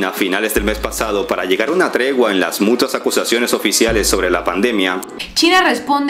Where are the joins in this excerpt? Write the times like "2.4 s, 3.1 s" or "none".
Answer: 5.1 s